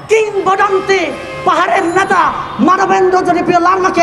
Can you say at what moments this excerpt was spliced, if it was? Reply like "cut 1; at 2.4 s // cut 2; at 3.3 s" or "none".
none

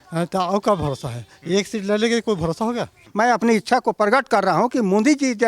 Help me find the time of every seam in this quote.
cut 1; at 3.0 s

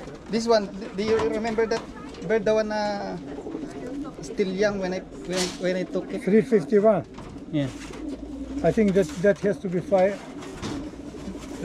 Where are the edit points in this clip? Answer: none

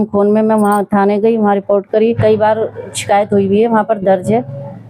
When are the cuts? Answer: cut 1; at 2.0 s

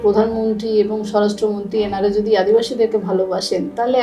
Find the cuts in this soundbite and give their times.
none

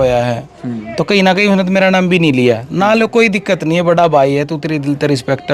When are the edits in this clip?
none

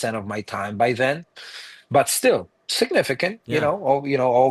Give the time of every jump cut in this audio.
none

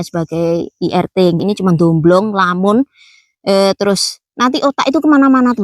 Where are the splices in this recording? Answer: cut 1; at 1.4 s

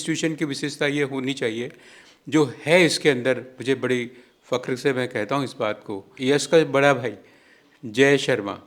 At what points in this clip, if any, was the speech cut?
cut 1; at 6.1 s

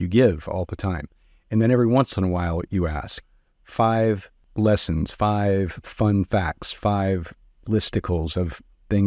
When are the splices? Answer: cut 1; at 3.6 s

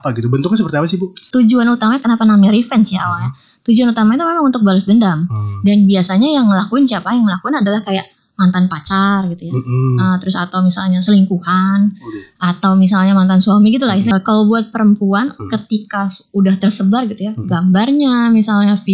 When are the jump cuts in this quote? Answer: cut 1; at 1.2 s // cut 2; at 14.1 s

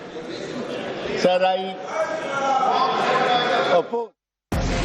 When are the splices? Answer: cut 1; at 2.5 s

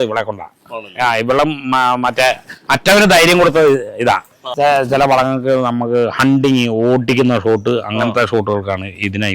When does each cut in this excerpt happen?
cut 1; at 4.5 s

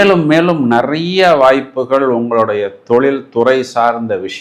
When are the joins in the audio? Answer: none

